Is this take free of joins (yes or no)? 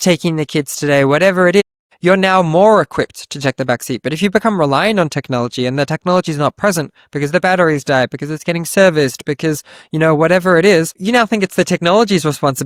yes